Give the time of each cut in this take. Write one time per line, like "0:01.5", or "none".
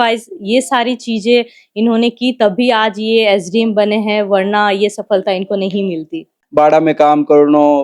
0:06.4